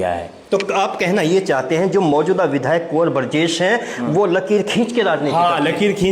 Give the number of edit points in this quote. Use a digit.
1